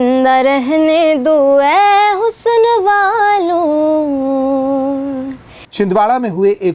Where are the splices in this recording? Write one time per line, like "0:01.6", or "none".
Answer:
0:05.6